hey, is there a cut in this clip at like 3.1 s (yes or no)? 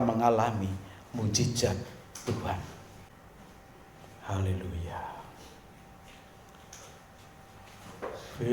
yes